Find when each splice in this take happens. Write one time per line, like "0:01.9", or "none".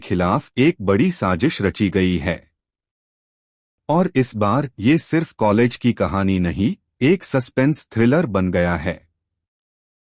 0:04.2